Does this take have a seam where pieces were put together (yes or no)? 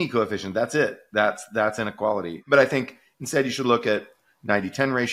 no